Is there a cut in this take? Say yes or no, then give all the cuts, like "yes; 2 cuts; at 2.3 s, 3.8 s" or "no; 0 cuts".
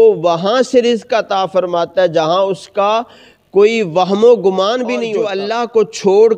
yes; 1 cut; at 5.2 s